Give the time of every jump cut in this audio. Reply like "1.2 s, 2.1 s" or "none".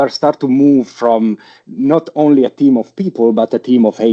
none